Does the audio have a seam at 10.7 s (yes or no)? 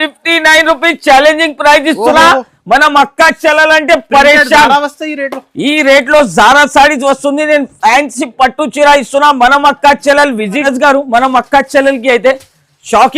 yes